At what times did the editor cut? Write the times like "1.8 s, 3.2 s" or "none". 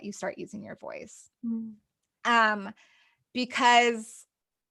none